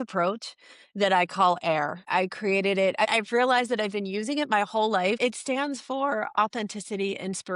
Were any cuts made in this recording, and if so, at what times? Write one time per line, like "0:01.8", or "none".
0:02.1
0:03.1
0:05.2

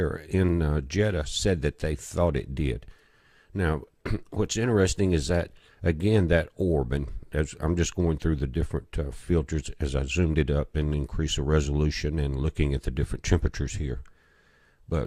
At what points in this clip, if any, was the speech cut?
none

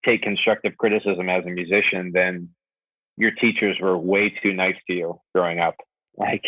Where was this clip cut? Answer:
none

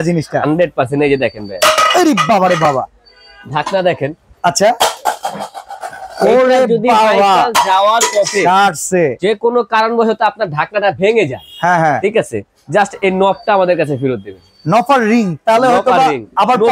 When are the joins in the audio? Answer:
none

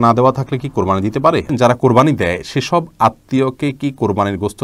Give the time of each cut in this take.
0:01.5

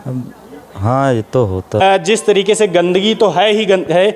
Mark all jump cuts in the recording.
0:01.8

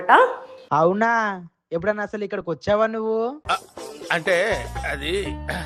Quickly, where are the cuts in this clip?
none

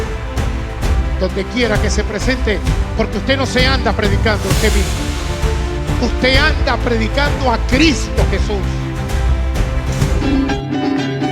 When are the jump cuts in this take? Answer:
0:10.2

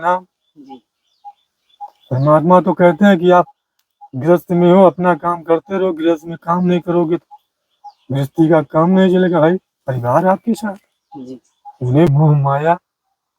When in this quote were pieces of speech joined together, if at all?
0:12.1

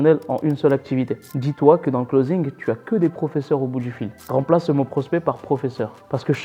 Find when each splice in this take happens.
0:01.3
0:04.2

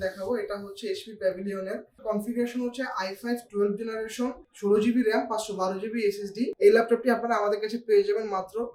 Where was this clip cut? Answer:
0:02.0
0:04.5
0:06.5

